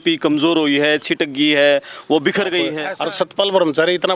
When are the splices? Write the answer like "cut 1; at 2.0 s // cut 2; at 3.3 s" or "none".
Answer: cut 1; at 2.8 s